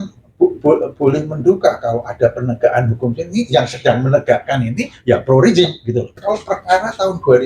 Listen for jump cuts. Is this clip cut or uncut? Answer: cut